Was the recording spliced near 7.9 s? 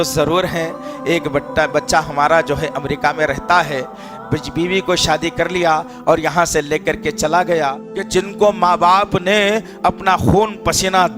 yes; 1 cut; at 7.9 s

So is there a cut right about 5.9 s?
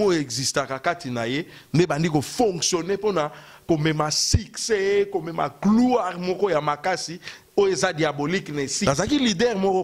no; 1 cut; at 8.8 s

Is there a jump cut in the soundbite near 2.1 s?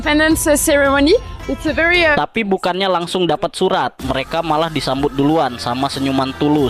yes; 1 cut; at 2.1 s

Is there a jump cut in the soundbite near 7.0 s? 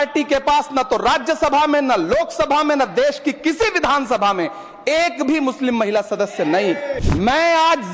yes; 1 cut; at 7.0 s

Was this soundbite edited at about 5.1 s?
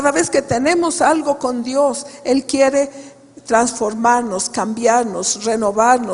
no; 1 cut; at 2.5 s

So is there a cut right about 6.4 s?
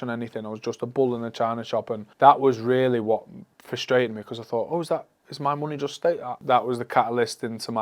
yes; 2 cuts; at 2.0 s, 6.4 s

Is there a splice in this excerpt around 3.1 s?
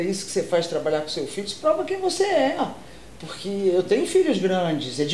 no; 0 cuts

